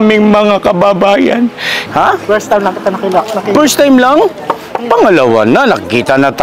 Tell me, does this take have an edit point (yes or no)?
yes